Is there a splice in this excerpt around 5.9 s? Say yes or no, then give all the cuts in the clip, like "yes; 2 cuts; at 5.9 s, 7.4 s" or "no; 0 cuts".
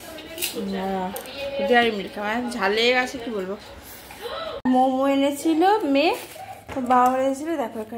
no; 1 cut; at 4.6 s